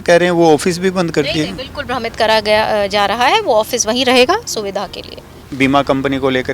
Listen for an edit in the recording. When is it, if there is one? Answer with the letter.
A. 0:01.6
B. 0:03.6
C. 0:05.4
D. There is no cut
C